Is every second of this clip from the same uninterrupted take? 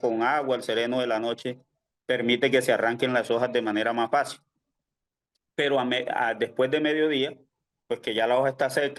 yes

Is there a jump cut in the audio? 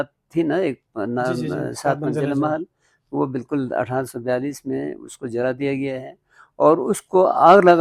no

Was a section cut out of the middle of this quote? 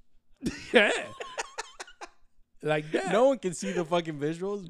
no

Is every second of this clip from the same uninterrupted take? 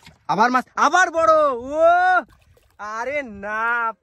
yes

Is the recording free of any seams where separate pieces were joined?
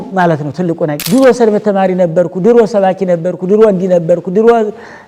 no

